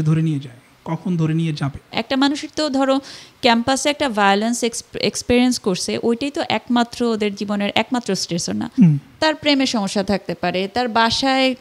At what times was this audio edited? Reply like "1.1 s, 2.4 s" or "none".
1.9 s